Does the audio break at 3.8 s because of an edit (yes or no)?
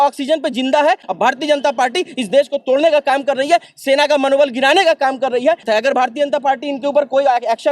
no